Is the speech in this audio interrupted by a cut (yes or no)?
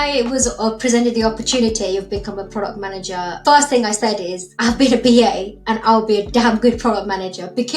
yes